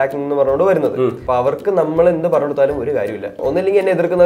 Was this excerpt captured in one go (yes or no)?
no